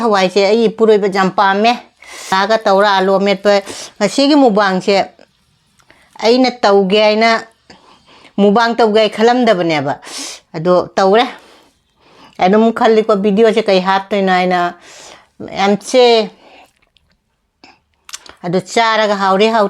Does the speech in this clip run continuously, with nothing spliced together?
no; 1 cut; at 2.3 s

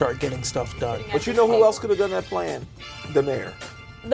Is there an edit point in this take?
yes; 1 cut; at 1.0 s

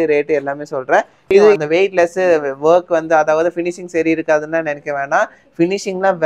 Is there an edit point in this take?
yes; 1 cut; at 1.6 s

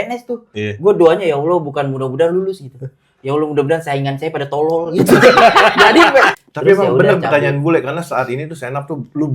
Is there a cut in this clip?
yes; 1 cut; at 6.4 s

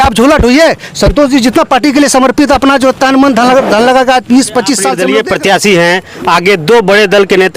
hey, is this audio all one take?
no; 1 cut; at 5.0 s

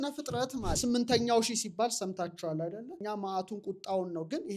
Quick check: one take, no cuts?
no; 2 cuts; at 0.8 s, 3.0 s

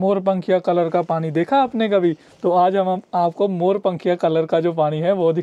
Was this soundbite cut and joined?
no; 0 cuts

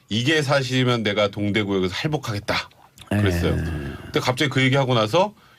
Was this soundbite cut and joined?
no; 0 cuts

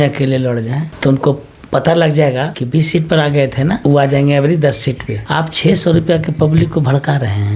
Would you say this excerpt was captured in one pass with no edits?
no; 4 cuts; at 0.9 s, 2.6 s, 3.8 s, 5.1 s

